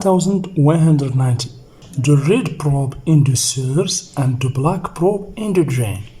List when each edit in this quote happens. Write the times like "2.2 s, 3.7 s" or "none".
1.8 s

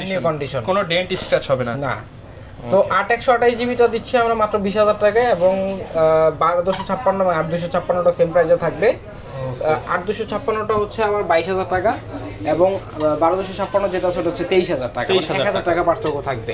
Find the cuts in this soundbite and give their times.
none

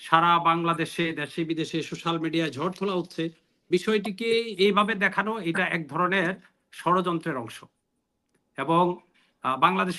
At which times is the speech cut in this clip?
none

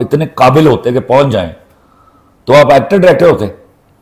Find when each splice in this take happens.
none

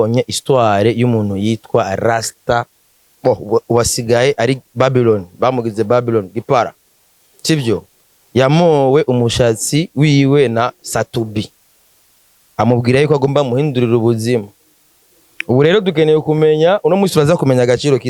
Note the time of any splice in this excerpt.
none

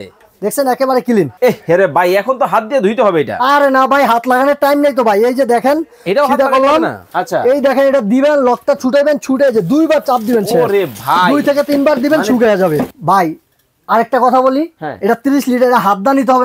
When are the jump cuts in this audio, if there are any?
1.3 s, 7.1 s, 12.9 s

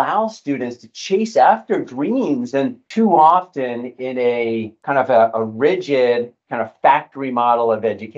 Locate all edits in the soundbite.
2.8 s, 4.7 s

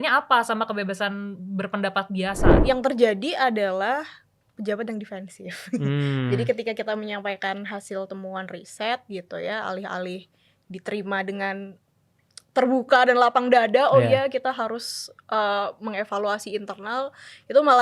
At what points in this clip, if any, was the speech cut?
2.6 s

